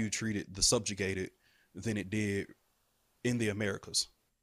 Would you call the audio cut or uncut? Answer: uncut